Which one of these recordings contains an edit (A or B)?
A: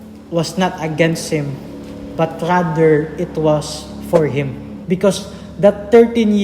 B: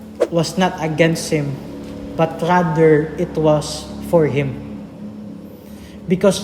A